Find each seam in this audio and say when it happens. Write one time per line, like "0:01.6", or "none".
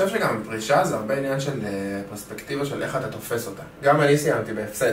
0:03.7